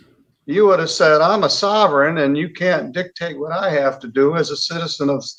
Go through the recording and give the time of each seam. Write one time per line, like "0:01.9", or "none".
none